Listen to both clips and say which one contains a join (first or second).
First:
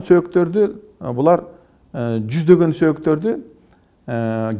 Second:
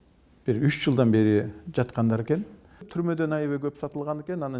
second